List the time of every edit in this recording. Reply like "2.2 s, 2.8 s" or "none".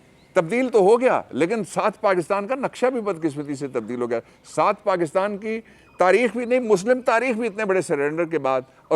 none